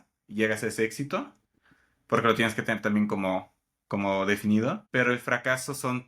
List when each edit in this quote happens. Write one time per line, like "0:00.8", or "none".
0:04.8